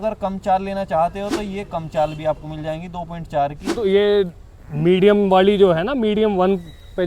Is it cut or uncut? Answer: cut